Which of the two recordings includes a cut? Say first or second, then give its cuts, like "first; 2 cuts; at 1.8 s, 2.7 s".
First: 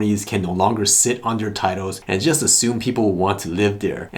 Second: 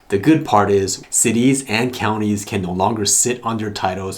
second; 1 cut; at 1.0 s